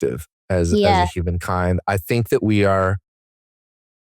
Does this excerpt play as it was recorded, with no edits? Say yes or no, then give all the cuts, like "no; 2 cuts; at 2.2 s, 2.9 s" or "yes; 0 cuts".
yes; 0 cuts